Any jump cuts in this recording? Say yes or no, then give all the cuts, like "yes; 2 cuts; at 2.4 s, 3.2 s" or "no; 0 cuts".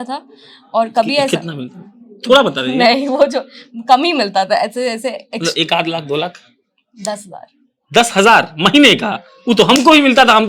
no; 0 cuts